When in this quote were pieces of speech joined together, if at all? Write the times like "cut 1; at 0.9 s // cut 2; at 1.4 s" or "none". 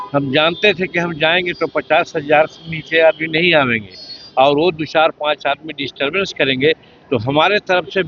none